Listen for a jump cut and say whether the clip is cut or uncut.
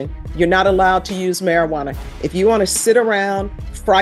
uncut